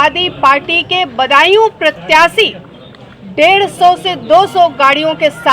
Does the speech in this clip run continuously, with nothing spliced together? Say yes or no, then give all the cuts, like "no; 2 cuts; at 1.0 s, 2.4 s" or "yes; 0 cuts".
yes; 0 cuts